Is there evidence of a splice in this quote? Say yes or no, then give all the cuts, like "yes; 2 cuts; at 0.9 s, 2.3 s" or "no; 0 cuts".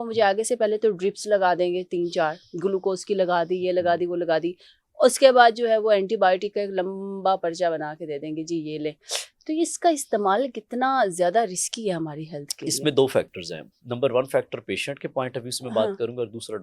no; 0 cuts